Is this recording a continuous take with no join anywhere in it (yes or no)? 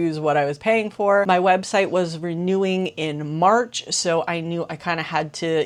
yes